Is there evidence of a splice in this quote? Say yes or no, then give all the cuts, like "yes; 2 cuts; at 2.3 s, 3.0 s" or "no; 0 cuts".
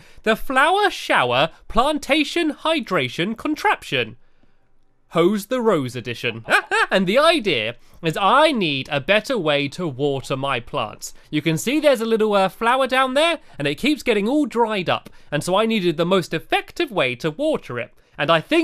yes; 1 cut; at 14.5 s